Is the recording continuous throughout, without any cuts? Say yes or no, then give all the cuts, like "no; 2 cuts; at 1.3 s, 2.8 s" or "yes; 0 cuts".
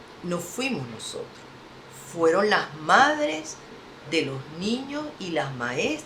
yes; 0 cuts